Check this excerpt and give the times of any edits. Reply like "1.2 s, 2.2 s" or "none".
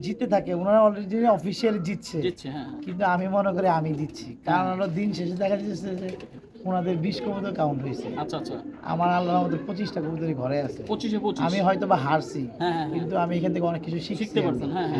none